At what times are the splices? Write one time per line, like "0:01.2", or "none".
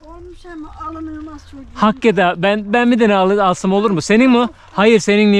none